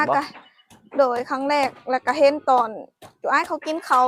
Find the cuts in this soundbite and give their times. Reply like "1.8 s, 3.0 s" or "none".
none